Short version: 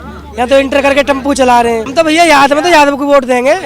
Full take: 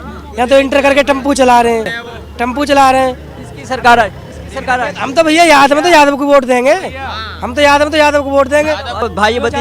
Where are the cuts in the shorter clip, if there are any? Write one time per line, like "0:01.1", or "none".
0:01.9